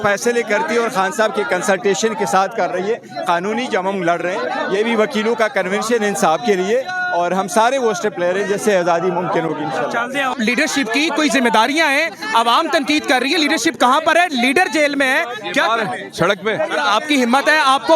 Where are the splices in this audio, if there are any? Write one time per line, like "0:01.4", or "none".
0:10.4